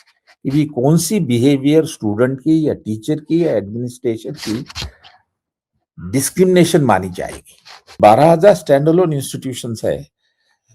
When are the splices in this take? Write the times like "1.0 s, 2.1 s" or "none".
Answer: 8.0 s